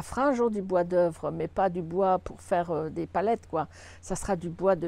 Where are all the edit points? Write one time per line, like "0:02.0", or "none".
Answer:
none